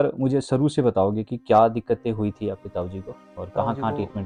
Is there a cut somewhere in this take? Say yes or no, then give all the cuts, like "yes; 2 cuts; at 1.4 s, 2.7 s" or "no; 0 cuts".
no; 0 cuts